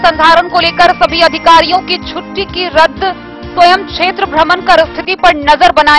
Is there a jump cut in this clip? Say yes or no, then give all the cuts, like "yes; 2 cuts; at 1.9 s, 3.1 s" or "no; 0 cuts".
no; 0 cuts